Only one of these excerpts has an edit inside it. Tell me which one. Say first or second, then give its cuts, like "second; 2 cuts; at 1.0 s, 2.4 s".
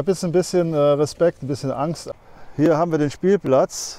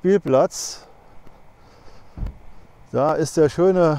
first; 1 cut; at 2.0 s